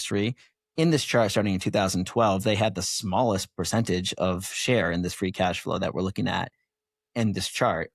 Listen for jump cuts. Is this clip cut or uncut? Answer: uncut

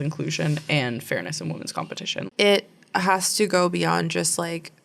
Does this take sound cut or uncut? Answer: uncut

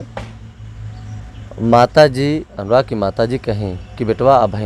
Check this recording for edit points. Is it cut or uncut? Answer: uncut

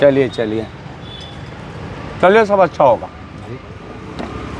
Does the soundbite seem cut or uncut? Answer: uncut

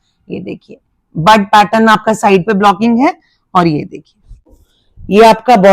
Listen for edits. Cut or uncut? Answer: cut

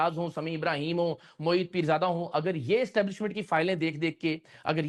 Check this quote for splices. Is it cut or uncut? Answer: uncut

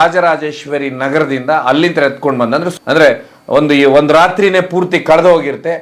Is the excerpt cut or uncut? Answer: uncut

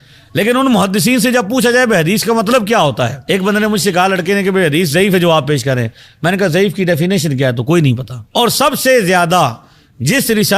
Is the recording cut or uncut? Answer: cut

